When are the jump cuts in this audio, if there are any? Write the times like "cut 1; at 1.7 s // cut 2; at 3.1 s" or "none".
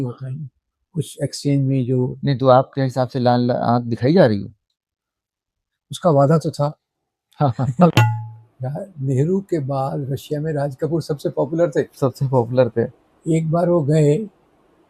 cut 1; at 7.9 s